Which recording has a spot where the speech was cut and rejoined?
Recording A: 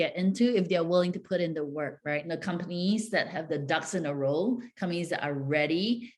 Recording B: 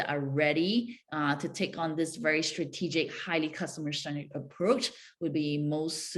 A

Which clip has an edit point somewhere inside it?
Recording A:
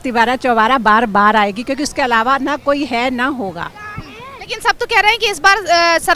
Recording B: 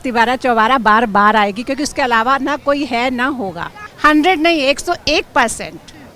B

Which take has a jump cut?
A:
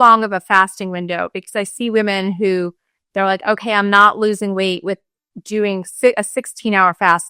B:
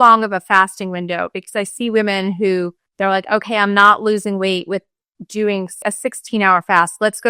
B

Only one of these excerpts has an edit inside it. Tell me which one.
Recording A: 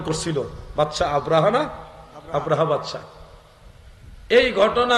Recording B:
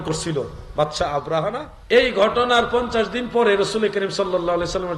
B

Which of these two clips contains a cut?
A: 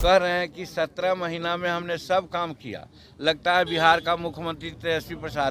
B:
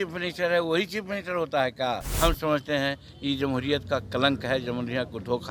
B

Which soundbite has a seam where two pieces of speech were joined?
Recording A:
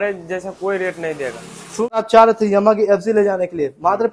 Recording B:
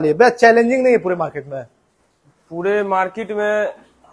A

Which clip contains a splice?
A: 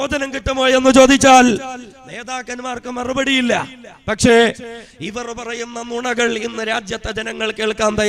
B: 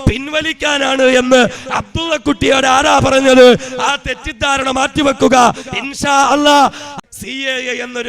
B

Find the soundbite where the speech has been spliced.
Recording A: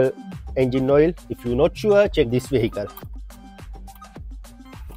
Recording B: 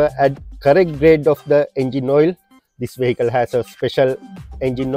A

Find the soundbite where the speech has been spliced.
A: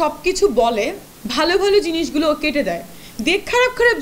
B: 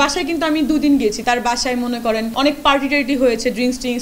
B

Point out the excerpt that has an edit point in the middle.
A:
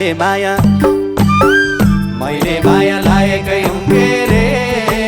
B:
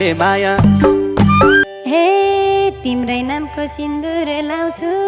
B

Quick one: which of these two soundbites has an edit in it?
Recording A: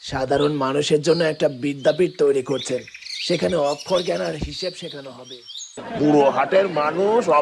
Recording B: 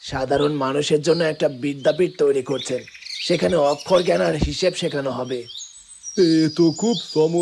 A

